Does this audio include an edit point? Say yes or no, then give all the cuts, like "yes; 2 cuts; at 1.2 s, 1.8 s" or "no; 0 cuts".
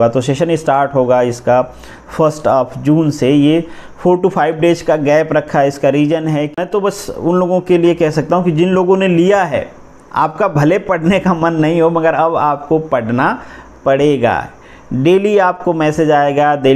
yes; 1 cut; at 6.6 s